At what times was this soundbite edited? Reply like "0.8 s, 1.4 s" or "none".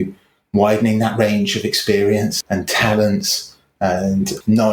none